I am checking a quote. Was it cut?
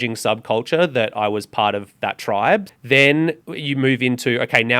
yes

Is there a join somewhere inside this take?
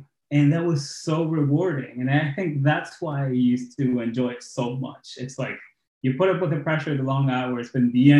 no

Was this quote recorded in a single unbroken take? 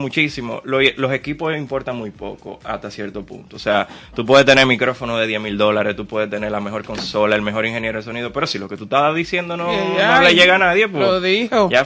yes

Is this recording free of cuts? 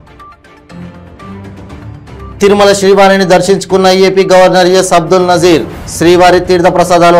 yes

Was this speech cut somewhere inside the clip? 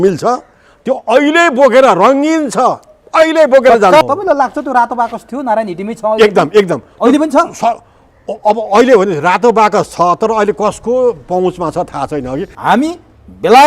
yes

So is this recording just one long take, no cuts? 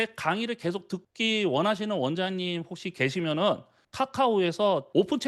no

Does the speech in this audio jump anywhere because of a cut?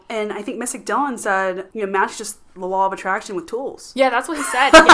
yes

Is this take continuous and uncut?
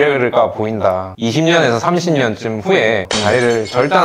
no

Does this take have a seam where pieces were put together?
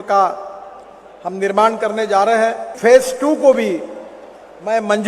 yes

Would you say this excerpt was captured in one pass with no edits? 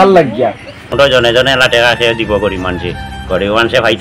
no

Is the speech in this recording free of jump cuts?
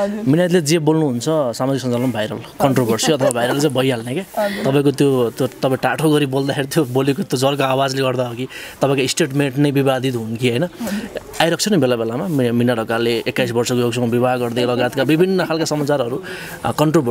yes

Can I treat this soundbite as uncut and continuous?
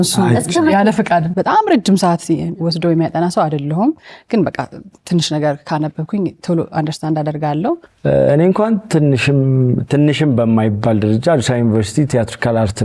no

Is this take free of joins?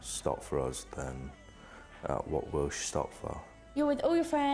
no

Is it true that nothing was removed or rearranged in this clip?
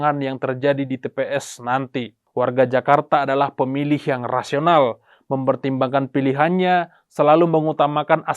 no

